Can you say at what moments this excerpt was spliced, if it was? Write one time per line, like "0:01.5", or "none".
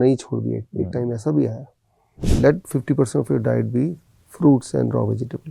0:02.2